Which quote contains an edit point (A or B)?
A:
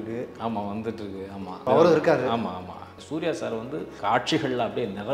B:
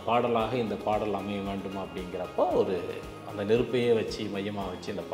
A